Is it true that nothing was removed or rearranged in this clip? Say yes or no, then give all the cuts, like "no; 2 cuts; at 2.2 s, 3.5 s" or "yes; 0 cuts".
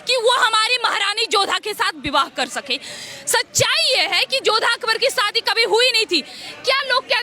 yes; 0 cuts